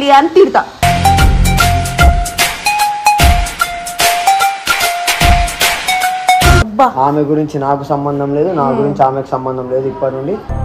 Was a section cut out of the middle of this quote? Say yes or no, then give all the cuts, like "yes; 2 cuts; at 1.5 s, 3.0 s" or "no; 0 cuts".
yes; 1 cut; at 6.7 s